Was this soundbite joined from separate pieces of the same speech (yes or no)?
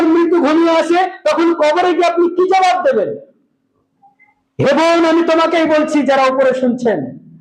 no